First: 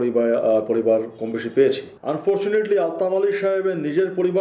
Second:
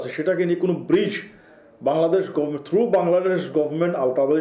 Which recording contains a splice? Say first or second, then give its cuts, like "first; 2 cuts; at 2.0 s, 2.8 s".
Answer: first; 1 cut; at 1.9 s